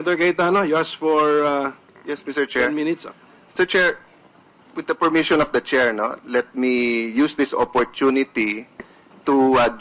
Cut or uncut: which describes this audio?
uncut